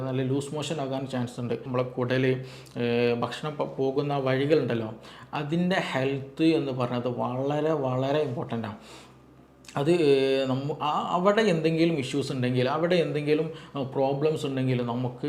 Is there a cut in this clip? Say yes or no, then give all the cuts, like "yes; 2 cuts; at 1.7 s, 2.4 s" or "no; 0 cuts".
yes; 1 cut; at 1.6 s